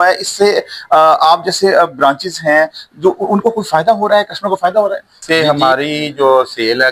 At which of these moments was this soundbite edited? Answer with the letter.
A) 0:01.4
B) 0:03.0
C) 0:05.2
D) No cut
C